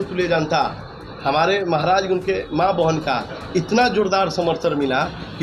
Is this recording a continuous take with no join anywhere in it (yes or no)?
yes